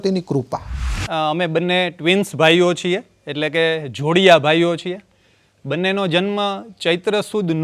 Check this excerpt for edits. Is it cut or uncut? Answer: cut